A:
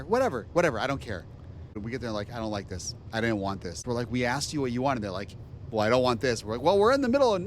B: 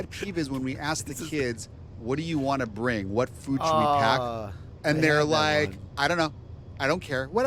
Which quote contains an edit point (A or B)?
A